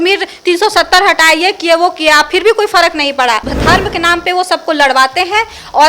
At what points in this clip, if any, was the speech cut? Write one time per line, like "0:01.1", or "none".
0:03.5